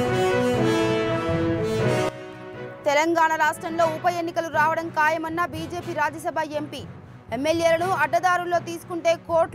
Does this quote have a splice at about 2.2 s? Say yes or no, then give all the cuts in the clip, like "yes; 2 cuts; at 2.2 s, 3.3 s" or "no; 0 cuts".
yes; 1 cut; at 2.2 s